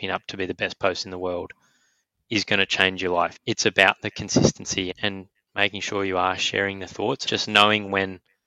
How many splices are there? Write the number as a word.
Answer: three